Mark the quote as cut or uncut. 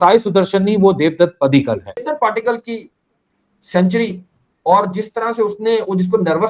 cut